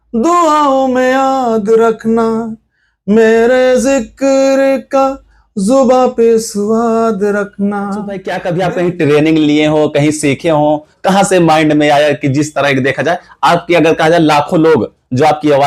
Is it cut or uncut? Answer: cut